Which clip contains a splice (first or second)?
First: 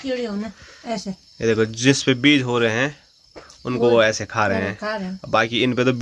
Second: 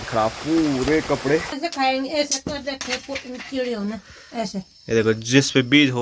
second